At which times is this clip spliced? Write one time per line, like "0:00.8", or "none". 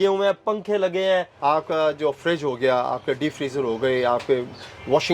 0:01.3